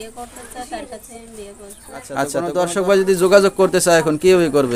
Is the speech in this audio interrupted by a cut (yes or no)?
yes